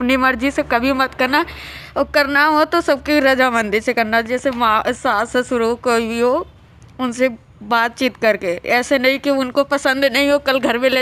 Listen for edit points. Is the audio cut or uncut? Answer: uncut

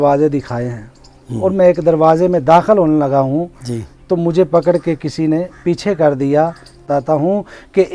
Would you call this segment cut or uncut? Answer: cut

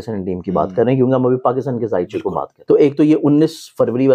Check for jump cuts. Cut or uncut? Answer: cut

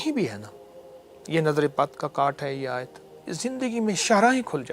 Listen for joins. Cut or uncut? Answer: cut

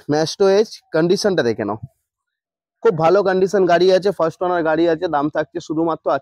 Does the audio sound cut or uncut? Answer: uncut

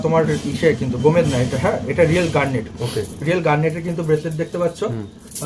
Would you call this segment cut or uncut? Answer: uncut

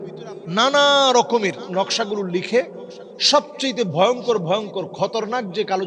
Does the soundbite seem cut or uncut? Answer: cut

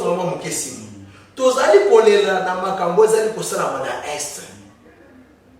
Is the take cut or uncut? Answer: uncut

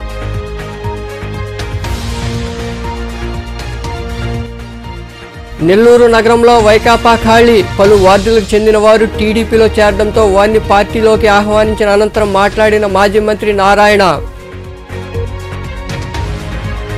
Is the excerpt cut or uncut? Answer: cut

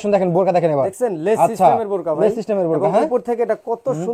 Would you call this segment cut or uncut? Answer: uncut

